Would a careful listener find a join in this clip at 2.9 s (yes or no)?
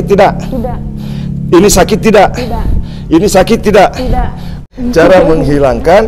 no